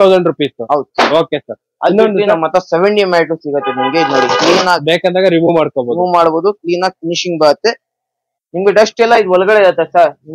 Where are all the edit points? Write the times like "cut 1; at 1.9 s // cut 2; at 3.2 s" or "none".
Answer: none